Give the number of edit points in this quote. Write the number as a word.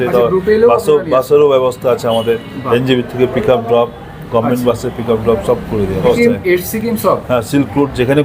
one